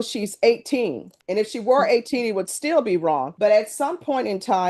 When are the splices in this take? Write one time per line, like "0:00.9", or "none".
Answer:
none